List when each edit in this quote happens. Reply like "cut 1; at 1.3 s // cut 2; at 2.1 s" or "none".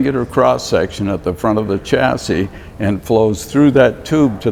none